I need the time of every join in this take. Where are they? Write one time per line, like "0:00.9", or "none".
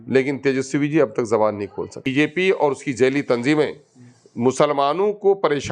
0:02.1